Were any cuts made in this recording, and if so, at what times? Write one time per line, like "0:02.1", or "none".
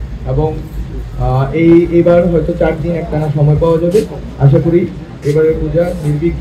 none

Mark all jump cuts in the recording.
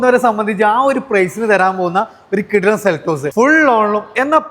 0:03.3

